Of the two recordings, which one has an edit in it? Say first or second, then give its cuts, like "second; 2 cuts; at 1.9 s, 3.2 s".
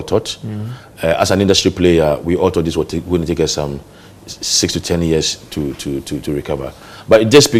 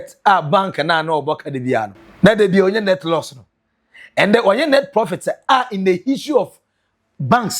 second; 1 cut; at 2.0 s